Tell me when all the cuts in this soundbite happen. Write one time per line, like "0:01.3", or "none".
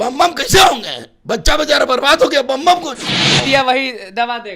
0:03.4

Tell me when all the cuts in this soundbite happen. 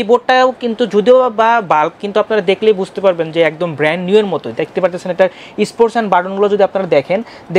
none

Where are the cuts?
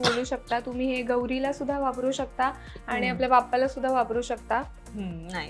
none

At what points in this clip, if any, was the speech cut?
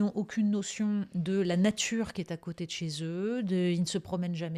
none

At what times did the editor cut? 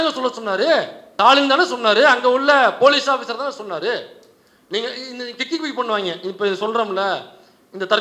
0:01.0

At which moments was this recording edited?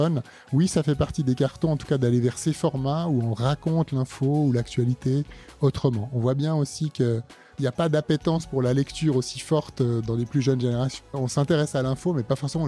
0:07.5
0:11.2

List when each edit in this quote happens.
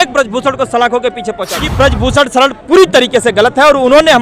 0:01.6

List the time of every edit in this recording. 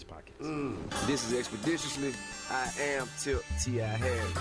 0:00.9

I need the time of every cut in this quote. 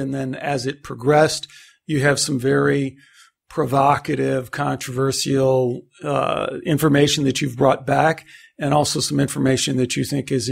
none

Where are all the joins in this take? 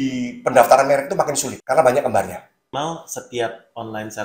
0:01.5
0:02.7

